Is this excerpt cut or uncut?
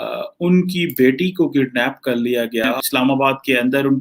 cut